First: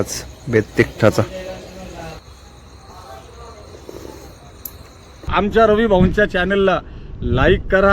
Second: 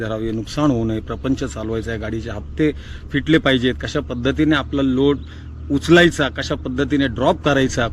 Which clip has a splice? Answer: first; 1 cut; at 5.3 s

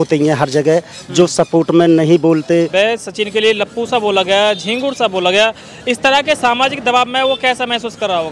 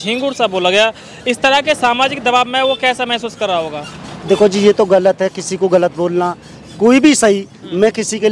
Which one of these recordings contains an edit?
first; 1 cut; at 2.7 s

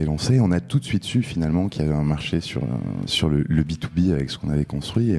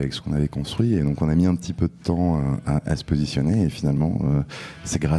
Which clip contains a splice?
first; 1 cut; at 3.1 s

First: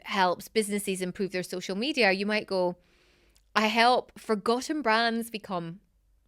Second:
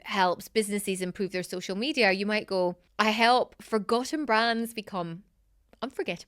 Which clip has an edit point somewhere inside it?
second; 1 cut; at 2.8 s

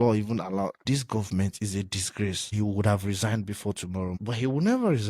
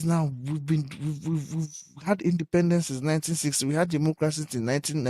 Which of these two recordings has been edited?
first; 3 cuts; at 0.8 s, 2.5 s, 4.2 s

